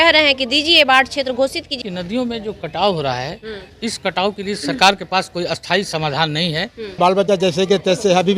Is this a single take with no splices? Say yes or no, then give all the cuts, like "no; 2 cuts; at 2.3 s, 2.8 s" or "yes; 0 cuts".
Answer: no; 2 cuts; at 1.8 s, 7.0 s